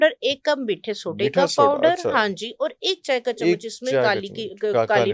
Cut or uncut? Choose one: uncut